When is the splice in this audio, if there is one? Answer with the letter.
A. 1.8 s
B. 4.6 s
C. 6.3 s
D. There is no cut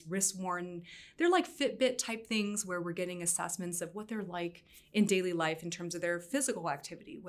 D